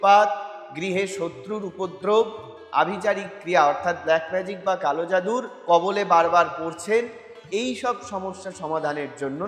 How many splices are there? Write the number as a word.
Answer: zero